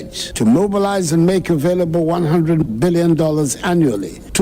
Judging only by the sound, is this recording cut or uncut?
cut